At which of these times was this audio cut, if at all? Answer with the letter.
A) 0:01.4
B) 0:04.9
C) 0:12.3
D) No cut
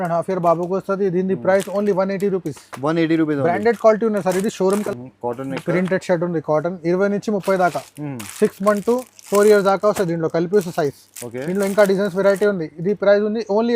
B